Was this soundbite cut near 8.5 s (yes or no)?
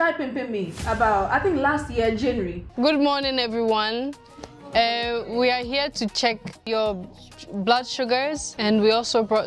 yes